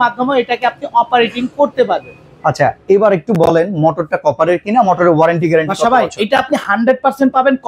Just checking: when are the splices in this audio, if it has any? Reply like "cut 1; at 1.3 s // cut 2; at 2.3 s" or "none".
none